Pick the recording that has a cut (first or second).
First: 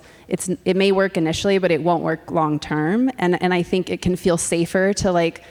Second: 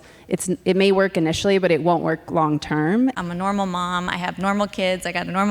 second